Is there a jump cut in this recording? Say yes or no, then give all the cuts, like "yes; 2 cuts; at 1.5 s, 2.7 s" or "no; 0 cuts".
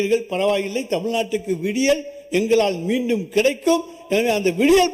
no; 0 cuts